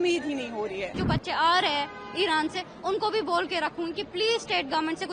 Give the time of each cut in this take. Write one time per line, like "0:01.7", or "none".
0:01.0